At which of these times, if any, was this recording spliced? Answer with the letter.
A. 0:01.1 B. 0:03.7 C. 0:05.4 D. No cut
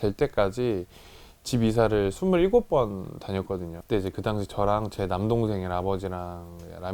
B